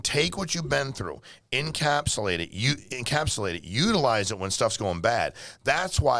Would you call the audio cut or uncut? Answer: uncut